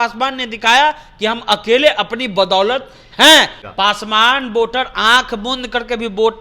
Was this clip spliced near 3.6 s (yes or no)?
yes